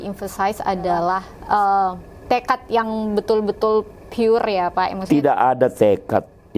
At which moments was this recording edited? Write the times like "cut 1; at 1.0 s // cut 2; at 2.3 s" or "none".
cut 1; at 1.3 s